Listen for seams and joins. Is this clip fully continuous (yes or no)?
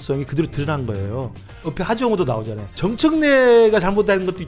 no